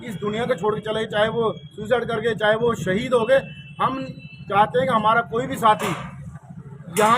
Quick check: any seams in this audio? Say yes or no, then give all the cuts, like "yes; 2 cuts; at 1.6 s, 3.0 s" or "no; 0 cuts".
yes; 1 cut; at 6.0 s